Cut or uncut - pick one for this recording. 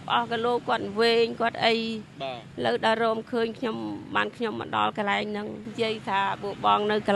cut